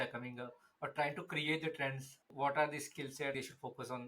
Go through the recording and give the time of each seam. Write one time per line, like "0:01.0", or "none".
0:02.3
0:03.3